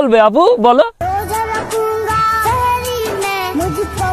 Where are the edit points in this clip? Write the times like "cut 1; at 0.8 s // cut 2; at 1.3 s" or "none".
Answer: cut 1; at 1.0 s